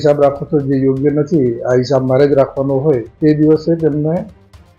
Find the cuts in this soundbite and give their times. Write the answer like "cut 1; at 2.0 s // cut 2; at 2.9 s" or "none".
cut 1; at 3.1 s